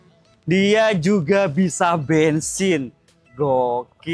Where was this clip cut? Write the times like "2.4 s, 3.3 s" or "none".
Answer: none